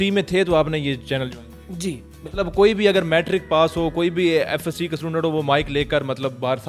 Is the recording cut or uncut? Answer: uncut